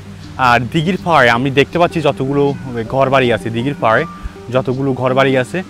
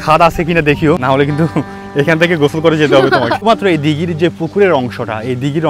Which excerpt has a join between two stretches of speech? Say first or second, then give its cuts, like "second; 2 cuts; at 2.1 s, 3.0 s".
second; 2 cuts; at 1.0 s, 3.4 s